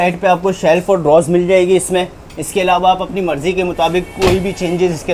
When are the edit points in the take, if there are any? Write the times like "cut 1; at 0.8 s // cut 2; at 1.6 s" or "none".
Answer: none